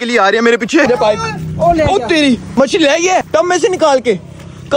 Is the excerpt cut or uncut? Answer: cut